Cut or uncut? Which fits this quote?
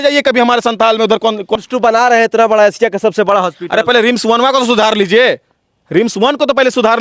cut